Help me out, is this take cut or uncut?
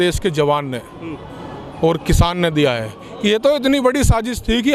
uncut